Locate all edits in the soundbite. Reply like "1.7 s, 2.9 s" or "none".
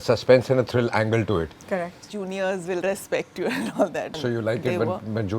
2.1 s, 4.2 s